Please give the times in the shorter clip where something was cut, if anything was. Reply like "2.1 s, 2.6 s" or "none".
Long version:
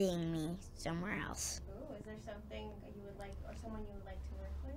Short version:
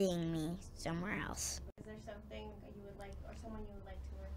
1.8 s